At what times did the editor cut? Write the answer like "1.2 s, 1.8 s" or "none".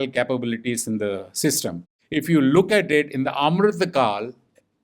1.9 s